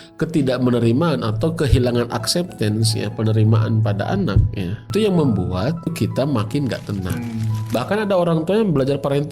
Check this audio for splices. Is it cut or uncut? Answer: cut